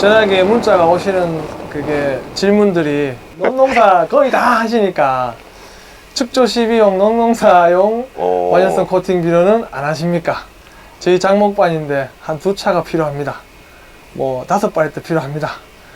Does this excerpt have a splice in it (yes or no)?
no